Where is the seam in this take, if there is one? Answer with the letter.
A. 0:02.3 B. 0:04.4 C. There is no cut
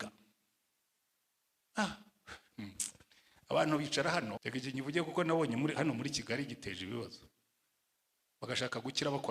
B